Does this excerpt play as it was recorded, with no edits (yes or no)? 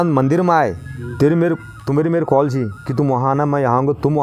yes